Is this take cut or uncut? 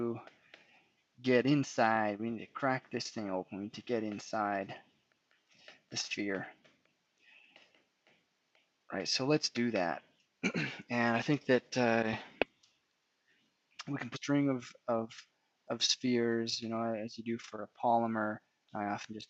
uncut